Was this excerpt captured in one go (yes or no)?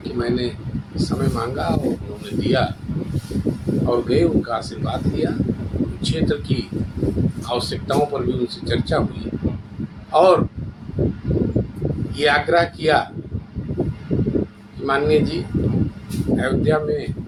yes